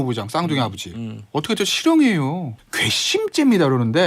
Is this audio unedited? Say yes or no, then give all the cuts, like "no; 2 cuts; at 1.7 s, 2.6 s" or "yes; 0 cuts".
no; 1 cut; at 2.5 s